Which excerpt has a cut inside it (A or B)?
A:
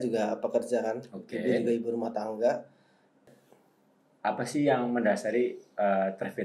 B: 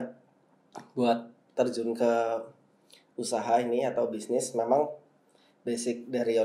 A